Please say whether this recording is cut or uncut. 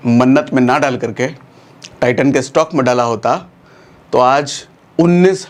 uncut